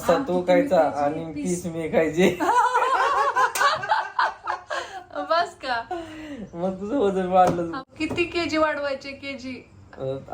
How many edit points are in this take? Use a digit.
1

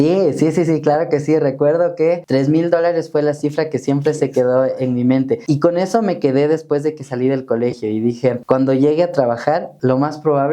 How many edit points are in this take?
4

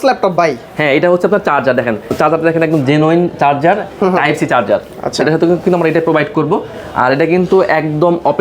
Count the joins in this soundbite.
1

